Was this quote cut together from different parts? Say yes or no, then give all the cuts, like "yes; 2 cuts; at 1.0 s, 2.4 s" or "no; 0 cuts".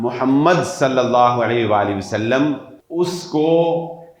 yes; 1 cut; at 2.8 s